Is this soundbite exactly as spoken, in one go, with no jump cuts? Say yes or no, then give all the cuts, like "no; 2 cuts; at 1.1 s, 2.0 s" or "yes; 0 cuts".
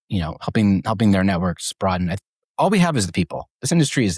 no; 1 cut; at 2.4 s